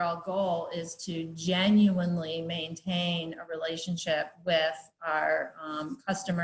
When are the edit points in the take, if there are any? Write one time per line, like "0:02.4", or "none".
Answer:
none